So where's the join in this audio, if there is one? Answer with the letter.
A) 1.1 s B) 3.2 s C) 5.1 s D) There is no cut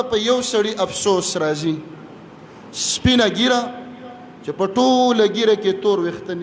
D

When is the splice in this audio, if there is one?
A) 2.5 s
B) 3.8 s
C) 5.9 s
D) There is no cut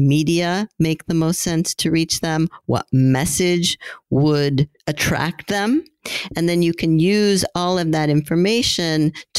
D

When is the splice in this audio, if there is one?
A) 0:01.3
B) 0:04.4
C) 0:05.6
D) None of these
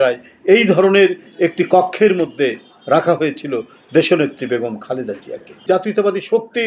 C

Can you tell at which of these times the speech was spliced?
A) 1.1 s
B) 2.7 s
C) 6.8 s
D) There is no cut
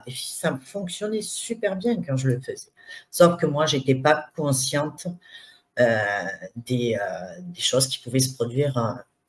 D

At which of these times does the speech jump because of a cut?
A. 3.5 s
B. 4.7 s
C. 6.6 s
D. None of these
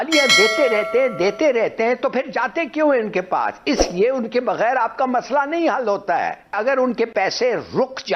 C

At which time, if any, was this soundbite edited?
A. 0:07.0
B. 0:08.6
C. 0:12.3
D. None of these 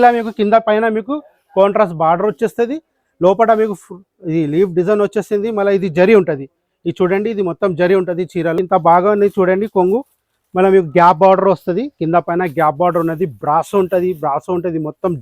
B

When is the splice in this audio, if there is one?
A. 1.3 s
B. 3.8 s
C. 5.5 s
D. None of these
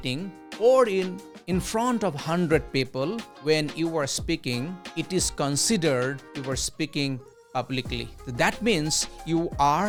D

